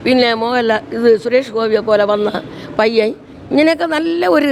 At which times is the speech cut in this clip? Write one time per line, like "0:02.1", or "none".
none